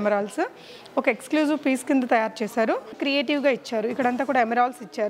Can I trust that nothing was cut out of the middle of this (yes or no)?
no